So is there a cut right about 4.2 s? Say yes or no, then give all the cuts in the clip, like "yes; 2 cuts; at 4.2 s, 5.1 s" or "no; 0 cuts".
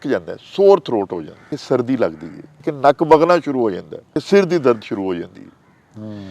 yes; 3 cuts; at 1.5 s, 2.7 s, 4.2 s